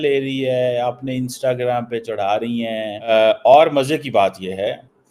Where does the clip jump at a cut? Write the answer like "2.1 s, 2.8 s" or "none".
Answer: 3.1 s